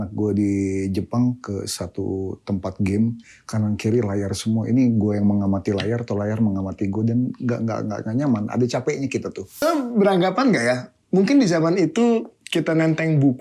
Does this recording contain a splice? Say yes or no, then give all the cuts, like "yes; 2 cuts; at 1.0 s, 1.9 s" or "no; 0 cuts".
yes; 1 cut; at 9.6 s